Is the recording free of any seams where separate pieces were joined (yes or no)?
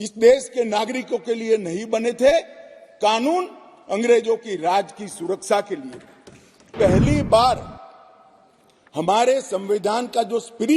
no